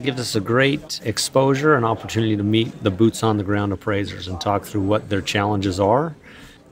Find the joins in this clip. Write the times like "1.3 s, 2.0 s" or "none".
1.0 s